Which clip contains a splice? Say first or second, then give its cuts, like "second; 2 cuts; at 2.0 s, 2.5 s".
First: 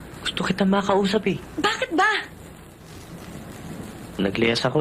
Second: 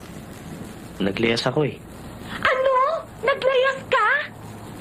first; 1 cut; at 1.5 s